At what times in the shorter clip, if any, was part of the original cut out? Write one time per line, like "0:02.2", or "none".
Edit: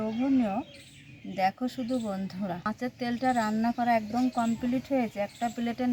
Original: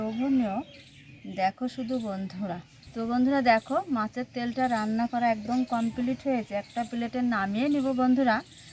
0:02.8